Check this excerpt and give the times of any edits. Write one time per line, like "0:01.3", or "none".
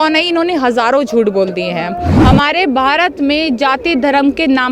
0:02.1